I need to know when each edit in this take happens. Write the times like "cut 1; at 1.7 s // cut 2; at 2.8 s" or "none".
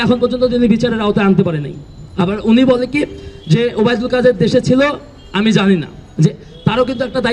none

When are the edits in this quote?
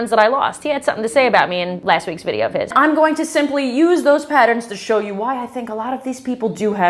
cut 1; at 2.7 s

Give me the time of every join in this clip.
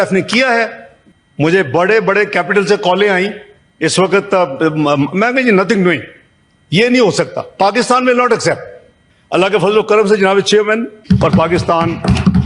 cut 1; at 10.9 s

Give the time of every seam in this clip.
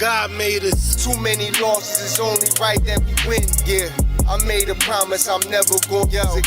cut 1; at 4.4 s

